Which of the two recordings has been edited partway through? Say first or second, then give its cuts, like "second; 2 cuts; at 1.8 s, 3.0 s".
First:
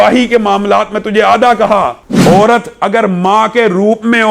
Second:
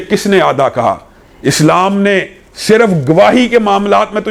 first; 1 cut; at 2.0 s